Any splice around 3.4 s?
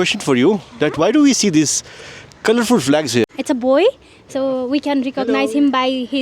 yes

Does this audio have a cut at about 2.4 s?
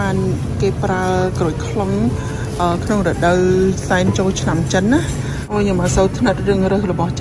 no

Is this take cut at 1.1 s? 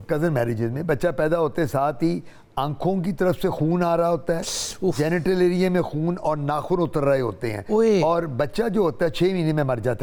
no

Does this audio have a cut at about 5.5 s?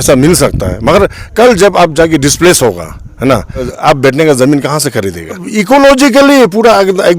yes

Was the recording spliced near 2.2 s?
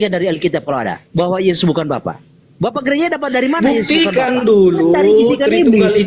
no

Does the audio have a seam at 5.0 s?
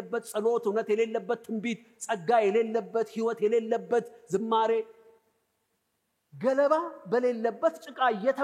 no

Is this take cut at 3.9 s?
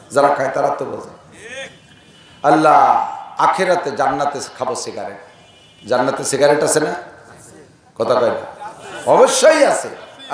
no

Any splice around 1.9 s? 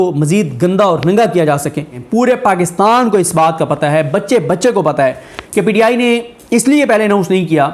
yes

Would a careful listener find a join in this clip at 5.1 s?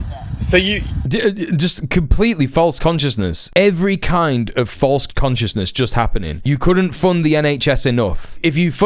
yes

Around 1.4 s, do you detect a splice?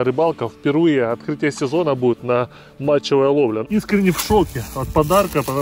no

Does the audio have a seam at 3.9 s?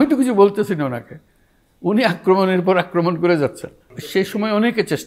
yes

